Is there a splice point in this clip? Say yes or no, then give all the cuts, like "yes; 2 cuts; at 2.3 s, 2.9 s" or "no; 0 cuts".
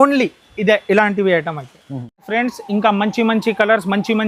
no; 0 cuts